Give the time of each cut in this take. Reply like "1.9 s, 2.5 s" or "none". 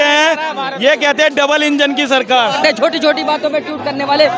2.6 s